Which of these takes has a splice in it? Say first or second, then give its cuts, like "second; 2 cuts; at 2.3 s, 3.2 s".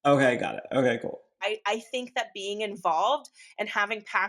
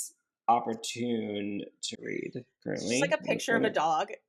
first; 1 cut; at 1.4 s